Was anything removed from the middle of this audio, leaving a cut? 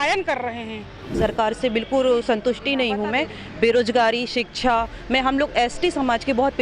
yes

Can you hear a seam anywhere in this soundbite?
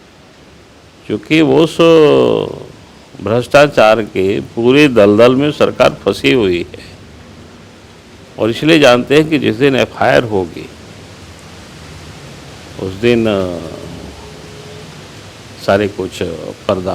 no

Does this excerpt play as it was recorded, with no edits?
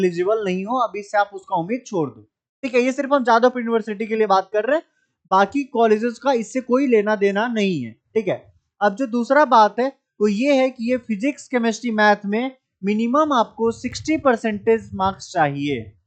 yes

